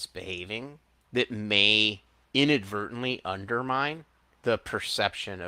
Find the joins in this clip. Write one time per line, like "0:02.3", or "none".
0:00.9
0:02.1
0:04.3